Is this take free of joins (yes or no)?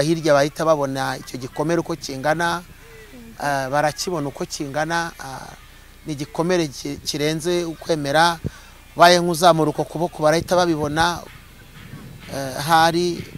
yes